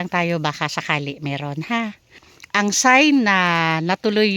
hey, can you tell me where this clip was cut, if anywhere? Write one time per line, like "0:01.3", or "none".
0:02.3